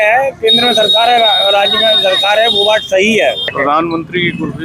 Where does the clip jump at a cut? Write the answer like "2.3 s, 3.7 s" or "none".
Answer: 3.5 s

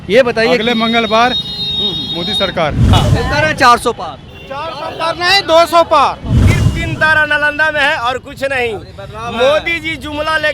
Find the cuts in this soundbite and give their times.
2.9 s, 6.4 s

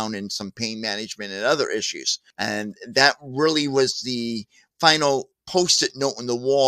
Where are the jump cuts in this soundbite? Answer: 5.4 s

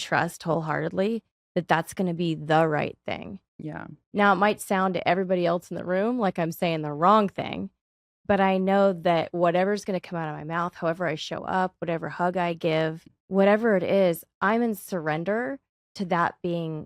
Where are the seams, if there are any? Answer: 13.1 s

